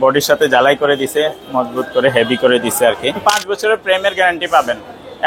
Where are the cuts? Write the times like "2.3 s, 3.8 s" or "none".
3.2 s